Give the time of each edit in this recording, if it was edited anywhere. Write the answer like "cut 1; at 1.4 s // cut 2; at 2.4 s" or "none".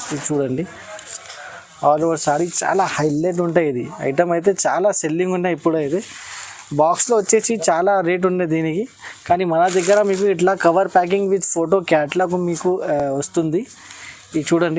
none